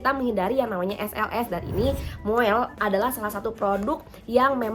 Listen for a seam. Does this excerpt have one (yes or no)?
no